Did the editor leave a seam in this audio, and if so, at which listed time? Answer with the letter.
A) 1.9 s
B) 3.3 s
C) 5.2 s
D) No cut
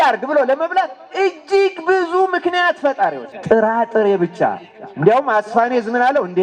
B